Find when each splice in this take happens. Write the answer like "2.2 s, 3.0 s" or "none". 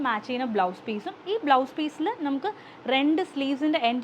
none